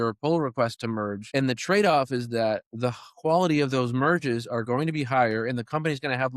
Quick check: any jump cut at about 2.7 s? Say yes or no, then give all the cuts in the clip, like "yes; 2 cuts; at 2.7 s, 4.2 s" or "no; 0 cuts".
no; 1 cut; at 1.2 s